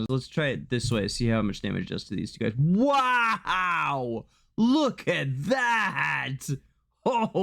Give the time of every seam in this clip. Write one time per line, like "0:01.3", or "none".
0:04.3